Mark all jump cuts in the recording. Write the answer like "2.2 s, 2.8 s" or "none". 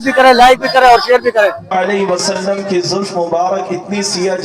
1.6 s

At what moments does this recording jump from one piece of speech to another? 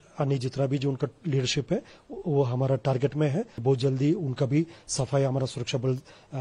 3.5 s

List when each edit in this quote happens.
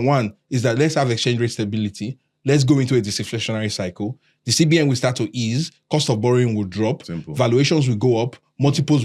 none

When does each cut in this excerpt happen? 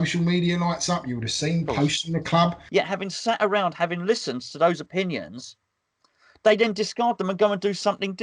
2.6 s

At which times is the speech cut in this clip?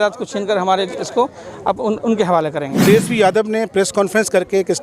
2.8 s

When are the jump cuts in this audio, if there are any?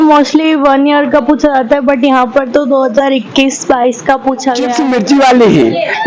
4.7 s

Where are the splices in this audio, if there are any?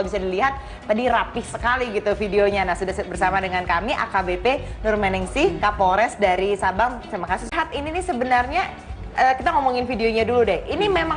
6.8 s

